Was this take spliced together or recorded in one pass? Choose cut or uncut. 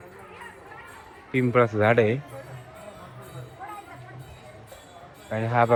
uncut